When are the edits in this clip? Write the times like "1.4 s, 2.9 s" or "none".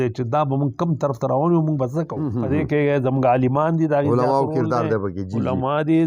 2.2 s